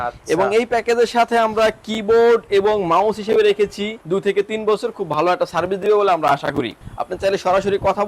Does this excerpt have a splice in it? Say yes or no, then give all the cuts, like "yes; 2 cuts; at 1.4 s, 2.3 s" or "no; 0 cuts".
yes; 2 cuts; at 3.9 s, 6.8 s